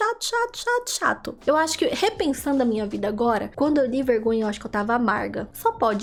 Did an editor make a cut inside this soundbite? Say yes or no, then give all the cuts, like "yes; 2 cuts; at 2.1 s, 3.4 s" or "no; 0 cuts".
no; 0 cuts